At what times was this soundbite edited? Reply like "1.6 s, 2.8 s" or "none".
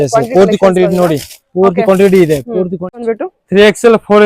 3.0 s